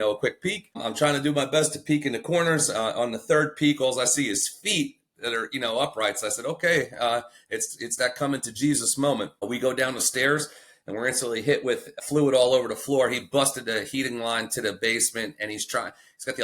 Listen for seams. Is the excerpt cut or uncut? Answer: uncut